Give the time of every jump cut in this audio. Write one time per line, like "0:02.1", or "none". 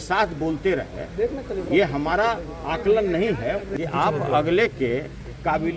0:03.7